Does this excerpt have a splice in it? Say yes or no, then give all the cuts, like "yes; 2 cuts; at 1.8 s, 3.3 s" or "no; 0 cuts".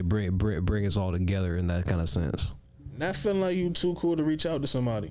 no; 0 cuts